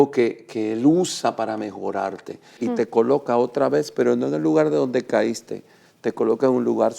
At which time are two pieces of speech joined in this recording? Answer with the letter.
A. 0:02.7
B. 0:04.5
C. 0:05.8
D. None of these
A